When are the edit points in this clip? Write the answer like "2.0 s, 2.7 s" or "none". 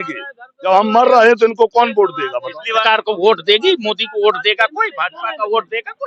2.8 s